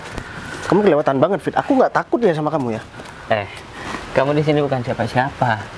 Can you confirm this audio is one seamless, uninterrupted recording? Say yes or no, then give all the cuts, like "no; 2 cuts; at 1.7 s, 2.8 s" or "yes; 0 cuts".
yes; 0 cuts